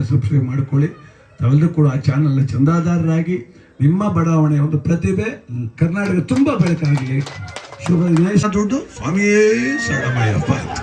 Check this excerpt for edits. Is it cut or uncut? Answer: cut